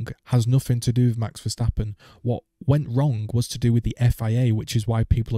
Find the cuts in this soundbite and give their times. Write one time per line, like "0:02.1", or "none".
none